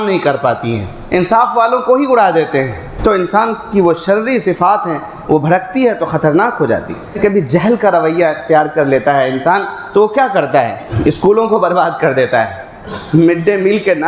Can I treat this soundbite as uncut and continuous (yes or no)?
no